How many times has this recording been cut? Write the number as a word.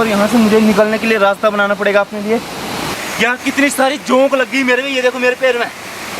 one